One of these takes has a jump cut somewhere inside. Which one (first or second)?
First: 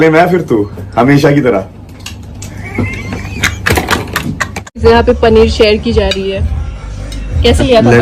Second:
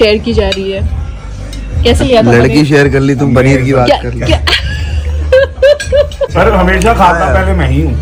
first